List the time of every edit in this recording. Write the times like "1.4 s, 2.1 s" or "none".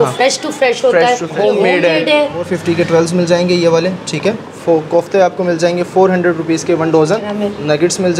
1.3 s, 2.5 s, 4.5 s, 7.3 s